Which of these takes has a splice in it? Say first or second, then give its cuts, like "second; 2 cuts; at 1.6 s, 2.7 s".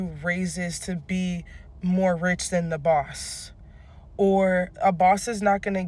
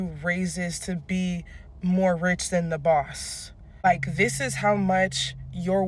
second; 1 cut; at 3.8 s